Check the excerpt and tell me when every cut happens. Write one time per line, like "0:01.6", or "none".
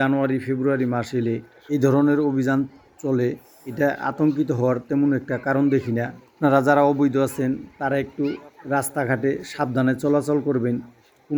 none